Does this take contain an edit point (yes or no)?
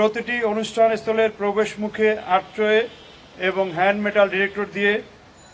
no